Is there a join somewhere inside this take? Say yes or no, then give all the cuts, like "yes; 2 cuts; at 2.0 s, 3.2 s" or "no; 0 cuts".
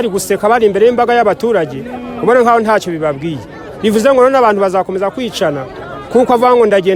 no; 0 cuts